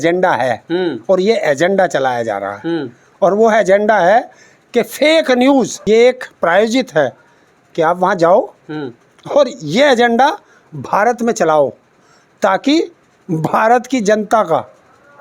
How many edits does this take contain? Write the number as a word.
one